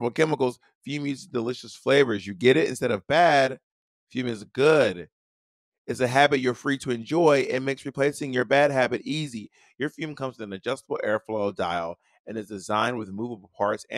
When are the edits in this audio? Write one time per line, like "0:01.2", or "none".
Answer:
none